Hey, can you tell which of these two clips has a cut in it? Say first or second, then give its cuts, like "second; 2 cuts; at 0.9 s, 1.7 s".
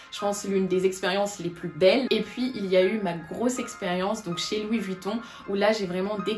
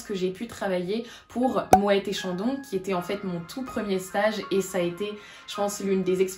first; 1 cut; at 2.1 s